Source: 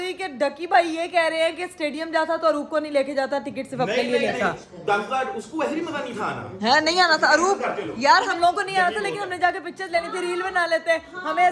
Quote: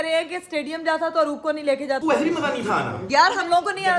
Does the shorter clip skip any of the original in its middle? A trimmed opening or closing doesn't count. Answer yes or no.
yes